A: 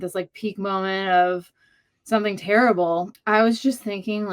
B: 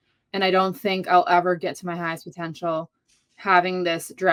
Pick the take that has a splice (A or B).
A